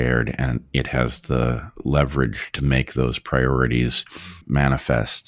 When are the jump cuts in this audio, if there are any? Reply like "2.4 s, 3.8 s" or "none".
4.4 s